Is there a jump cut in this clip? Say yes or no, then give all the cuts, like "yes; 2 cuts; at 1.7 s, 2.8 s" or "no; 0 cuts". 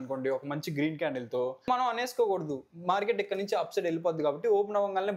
yes; 1 cut; at 1.7 s